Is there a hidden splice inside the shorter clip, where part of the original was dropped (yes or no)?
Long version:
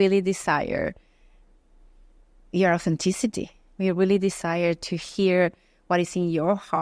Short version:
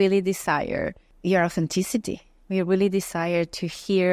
yes